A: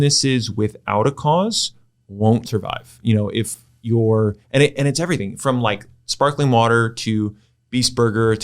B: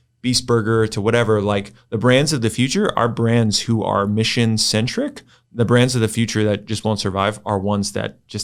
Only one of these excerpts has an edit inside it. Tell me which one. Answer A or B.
A